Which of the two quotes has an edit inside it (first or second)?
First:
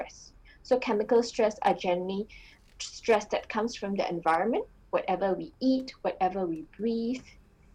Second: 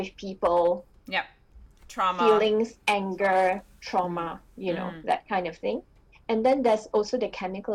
second